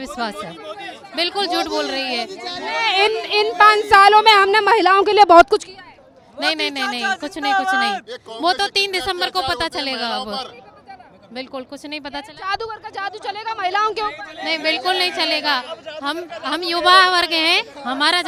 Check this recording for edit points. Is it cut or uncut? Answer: uncut